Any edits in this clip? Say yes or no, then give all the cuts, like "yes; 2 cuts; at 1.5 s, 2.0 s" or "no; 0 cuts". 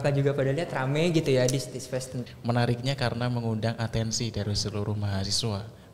yes; 1 cut; at 2.2 s